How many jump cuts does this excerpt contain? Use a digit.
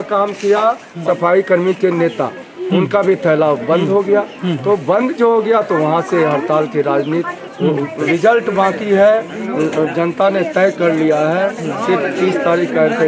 2